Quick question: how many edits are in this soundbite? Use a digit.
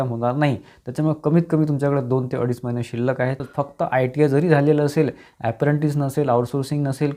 1